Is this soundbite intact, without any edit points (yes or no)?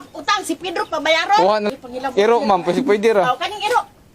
no